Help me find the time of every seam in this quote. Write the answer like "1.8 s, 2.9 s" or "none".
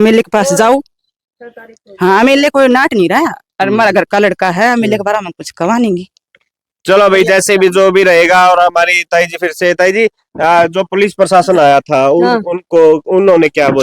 none